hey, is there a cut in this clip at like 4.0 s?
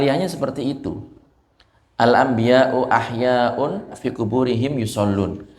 yes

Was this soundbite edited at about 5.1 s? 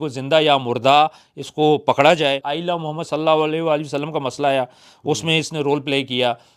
no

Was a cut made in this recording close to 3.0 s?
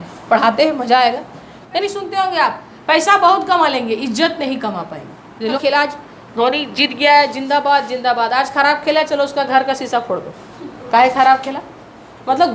no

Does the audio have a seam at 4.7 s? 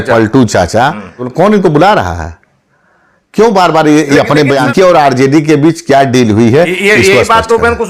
yes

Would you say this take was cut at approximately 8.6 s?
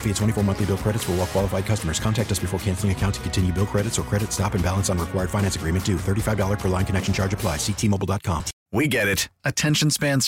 yes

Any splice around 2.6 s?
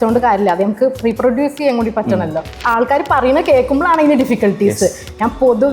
yes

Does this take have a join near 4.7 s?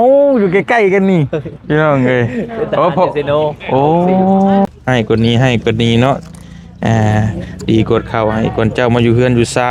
yes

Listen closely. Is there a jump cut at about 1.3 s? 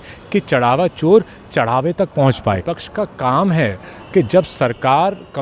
no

